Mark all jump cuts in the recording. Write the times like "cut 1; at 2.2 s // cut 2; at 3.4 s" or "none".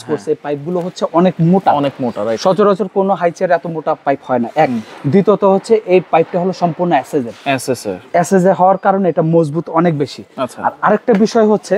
none